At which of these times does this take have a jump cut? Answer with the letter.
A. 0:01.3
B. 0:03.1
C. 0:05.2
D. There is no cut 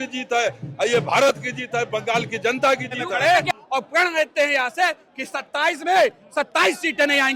B